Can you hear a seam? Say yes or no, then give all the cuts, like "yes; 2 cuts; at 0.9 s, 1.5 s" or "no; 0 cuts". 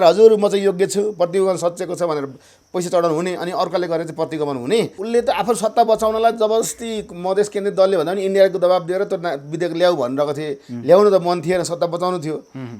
yes; 1 cut; at 5.0 s